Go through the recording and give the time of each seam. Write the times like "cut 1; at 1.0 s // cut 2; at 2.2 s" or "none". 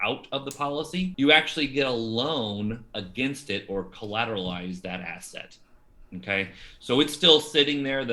cut 1; at 1.1 s